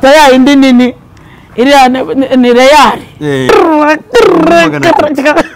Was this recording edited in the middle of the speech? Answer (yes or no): yes